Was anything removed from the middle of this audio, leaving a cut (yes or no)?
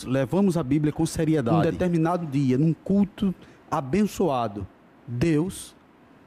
yes